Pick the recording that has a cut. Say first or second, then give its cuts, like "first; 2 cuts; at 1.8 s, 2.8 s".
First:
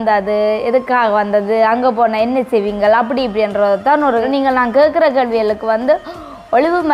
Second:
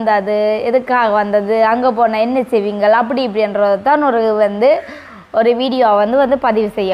first; 1 cut; at 4.3 s